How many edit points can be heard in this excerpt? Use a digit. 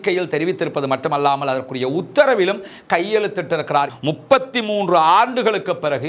1